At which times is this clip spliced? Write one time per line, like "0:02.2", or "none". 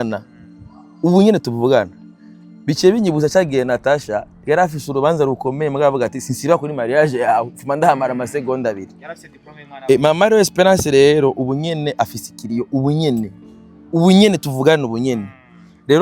none